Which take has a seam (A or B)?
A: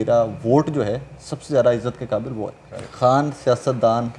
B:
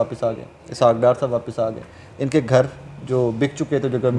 A